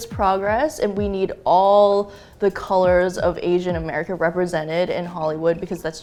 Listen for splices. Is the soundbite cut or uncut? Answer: uncut